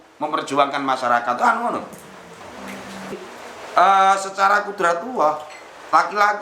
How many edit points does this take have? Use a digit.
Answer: 1